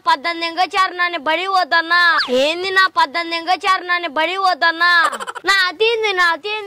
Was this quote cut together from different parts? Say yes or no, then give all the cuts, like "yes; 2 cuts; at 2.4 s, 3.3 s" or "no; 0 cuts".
yes; 2 cuts; at 2.2 s, 5.1 s